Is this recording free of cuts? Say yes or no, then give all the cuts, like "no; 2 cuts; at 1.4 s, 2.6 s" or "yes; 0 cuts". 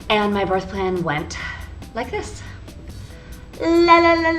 yes; 0 cuts